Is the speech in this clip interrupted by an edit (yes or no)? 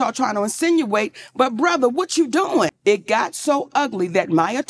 yes